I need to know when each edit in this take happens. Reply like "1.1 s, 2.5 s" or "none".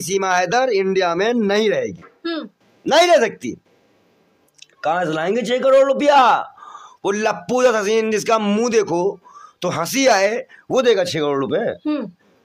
none